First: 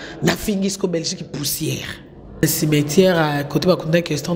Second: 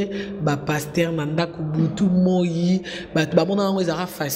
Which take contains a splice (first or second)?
first